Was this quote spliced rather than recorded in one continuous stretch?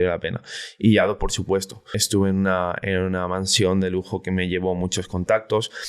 yes; 1 cut; at 1.9 s

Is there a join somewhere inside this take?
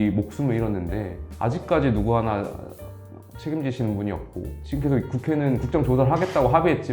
yes; 1 cut; at 4.6 s

